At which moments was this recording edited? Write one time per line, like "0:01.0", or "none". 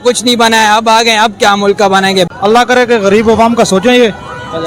0:02.3